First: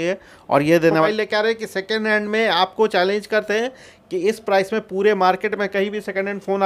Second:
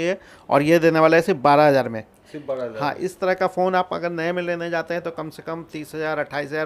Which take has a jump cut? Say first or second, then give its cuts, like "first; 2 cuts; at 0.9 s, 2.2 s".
first; 1 cut; at 1.1 s